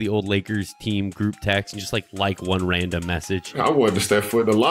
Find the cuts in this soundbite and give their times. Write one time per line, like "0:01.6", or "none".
0:03.5